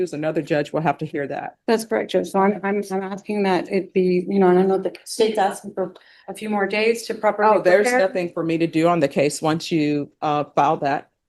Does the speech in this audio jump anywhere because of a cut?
no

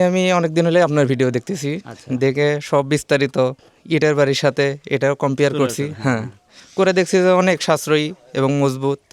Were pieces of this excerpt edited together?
no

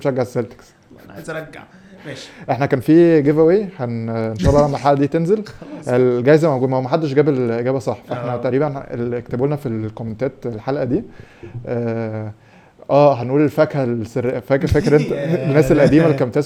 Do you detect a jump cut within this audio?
no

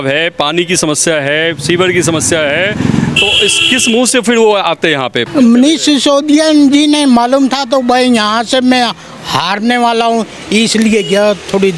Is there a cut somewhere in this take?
yes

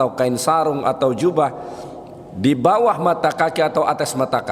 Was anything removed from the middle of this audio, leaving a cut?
no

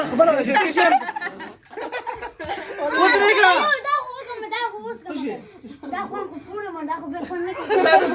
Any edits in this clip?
no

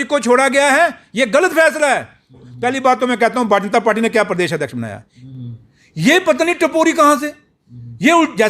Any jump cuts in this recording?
yes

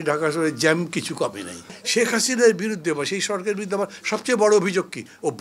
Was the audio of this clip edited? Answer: yes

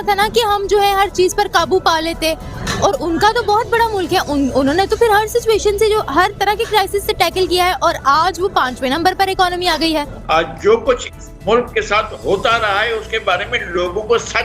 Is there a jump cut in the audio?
yes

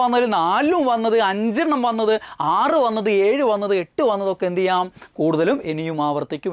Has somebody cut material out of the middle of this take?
no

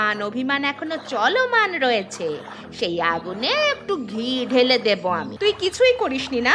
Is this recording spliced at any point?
yes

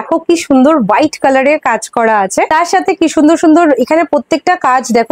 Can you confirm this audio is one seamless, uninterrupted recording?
yes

